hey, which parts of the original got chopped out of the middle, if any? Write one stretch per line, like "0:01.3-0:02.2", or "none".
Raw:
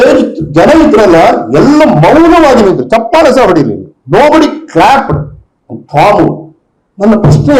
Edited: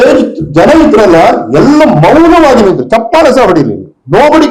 none